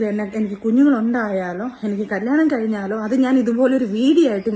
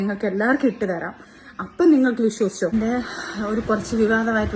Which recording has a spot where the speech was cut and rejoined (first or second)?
second